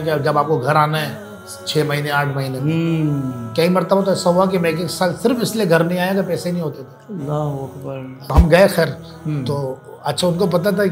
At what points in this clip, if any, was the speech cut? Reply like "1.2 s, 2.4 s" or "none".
8.3 s